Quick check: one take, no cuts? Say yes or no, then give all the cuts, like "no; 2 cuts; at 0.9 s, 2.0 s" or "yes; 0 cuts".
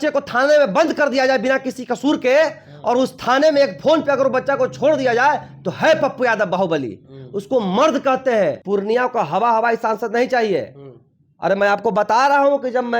no; 1 cut; at 8.6 s